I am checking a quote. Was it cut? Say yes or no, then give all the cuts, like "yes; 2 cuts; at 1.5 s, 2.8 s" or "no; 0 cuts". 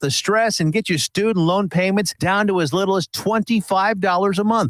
no; 0 cuts